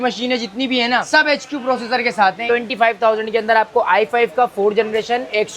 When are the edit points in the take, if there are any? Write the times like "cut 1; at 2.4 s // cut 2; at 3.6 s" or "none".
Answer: cut 1; at 2.4 s